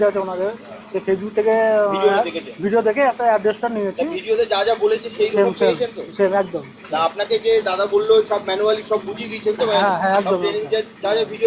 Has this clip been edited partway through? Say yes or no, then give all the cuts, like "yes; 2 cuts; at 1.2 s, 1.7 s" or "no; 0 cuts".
no; 0 cuts